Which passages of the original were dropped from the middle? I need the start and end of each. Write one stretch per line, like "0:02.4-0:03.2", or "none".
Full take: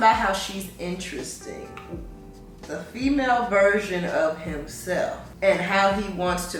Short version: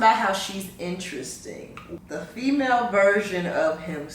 0:02.0-0:02.6

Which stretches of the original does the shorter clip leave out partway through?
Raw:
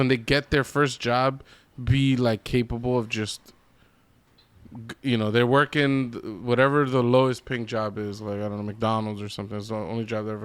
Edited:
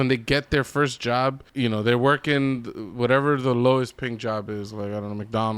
0:01.4-0:04.9

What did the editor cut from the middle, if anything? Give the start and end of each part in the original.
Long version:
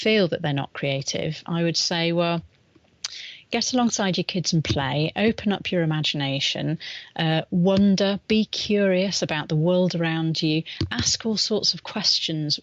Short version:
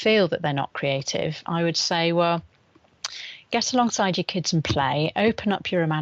none

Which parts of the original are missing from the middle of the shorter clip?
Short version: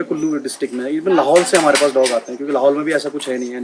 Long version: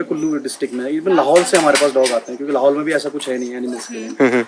none

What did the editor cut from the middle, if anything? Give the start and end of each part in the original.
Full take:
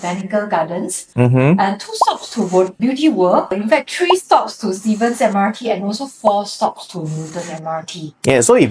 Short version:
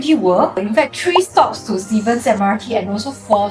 none

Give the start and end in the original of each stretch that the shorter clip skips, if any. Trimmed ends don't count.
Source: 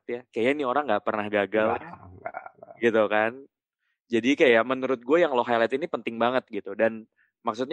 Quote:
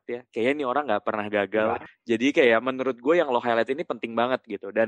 0:01.9-0:03.9

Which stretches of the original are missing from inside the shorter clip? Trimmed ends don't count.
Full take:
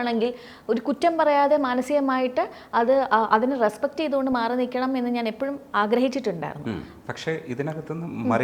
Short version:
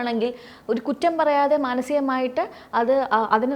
none

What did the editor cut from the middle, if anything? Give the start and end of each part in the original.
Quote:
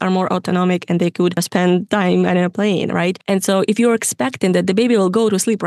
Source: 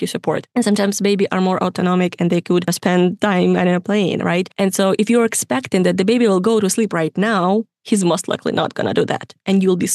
none

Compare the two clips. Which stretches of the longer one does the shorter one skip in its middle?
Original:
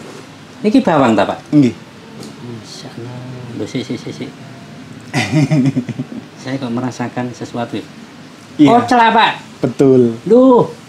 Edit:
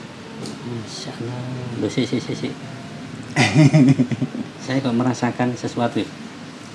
none

